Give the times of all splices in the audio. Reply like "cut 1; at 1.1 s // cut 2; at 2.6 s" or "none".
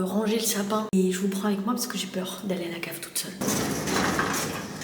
cut 1; at 0.9 s // cut 2; at 3.4 s